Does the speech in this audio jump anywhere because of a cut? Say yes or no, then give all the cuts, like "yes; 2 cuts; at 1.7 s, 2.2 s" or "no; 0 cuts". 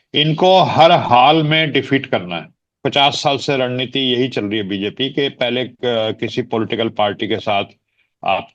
yes; 1 cut; at 2.7 s